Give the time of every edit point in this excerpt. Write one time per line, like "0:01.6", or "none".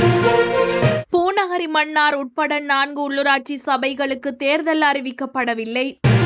0:01.0